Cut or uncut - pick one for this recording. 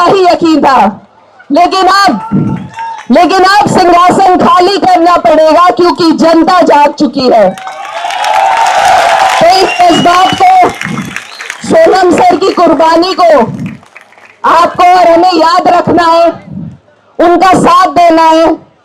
uncut